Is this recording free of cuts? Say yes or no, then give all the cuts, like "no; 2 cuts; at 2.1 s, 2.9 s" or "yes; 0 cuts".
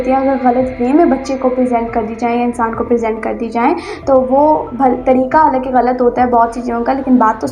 yes; 0 cuts